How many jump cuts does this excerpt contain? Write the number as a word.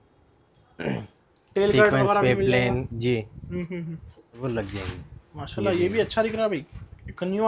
one